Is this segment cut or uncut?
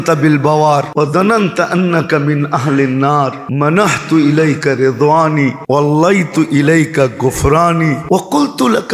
cut